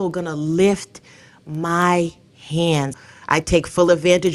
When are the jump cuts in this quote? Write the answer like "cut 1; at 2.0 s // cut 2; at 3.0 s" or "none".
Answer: cut 1; at 2.9 s